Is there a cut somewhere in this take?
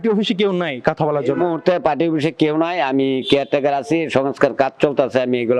no; 0 cuts

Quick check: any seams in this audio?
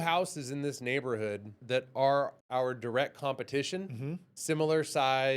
yes; 2 cuts; at 1.6 s, 2.4 s

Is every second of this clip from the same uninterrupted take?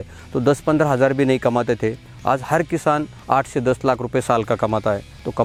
yes; 0 cuts

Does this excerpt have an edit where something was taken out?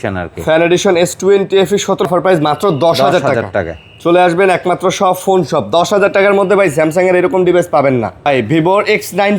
yes; 2 cuts; at 2.1 s, 8.3 s

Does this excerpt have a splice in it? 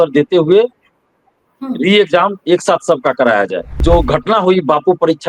yes; 1 cut; at 3.8 s

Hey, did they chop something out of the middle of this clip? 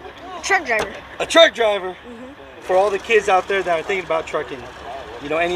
yes; 1 cut; at 2.6 s

